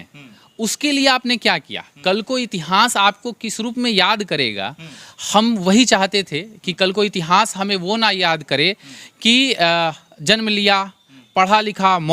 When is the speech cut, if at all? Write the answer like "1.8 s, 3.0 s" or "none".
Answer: none